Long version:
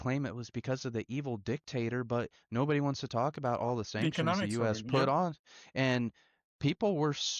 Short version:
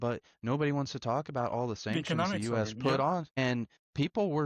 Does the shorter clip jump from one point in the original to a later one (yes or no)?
yes